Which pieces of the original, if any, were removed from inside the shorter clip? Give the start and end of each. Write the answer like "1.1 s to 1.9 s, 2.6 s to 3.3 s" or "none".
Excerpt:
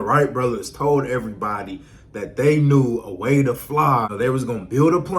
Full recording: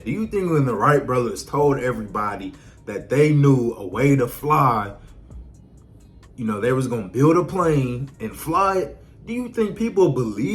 4.9 s to 6.6 s